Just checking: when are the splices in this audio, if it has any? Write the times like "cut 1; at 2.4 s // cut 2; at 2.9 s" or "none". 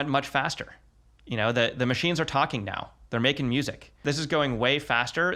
cut 1; at 4.0 s